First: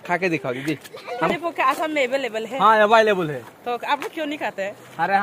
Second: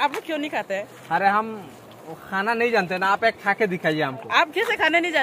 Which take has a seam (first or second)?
first